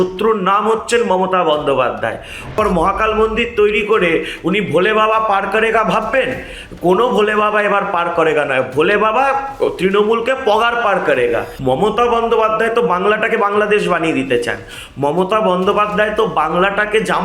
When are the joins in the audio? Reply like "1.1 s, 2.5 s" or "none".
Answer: 2.5 s, 11.5 s